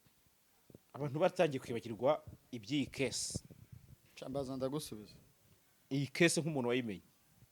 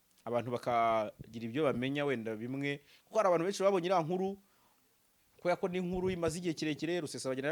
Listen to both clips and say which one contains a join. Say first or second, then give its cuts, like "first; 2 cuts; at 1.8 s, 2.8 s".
first; 1 cut; at 4.1 s